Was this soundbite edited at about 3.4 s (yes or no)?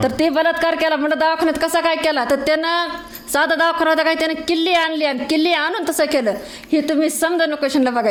no